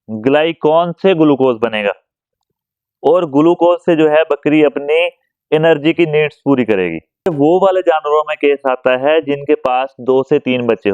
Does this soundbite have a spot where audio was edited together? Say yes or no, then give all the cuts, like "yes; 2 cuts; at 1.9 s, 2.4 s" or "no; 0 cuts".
yes; 1 cut; at 7.3 s